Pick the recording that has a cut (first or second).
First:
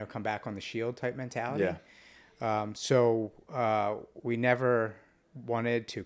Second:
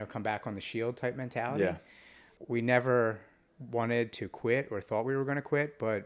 second